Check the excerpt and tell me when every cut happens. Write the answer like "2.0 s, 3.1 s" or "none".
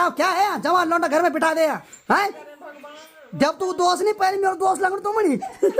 1.9 s

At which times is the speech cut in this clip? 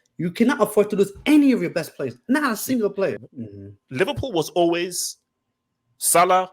3.2 s

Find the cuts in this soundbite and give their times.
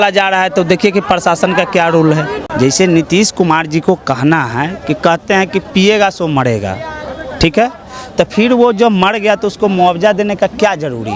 2.4 s

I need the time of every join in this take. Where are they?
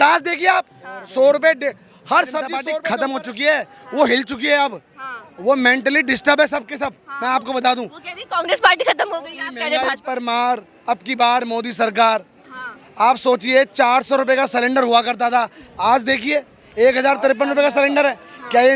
2.7 s, 9.6 s

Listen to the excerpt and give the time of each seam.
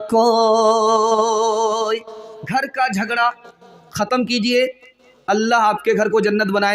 none

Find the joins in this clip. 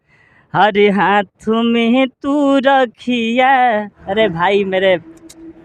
4.0 s

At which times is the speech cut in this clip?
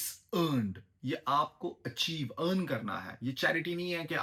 none

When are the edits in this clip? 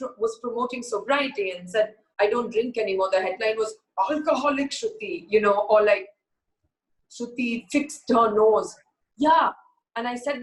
none

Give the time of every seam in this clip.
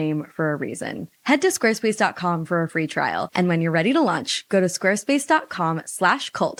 none

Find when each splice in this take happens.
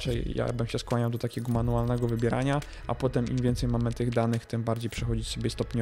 none

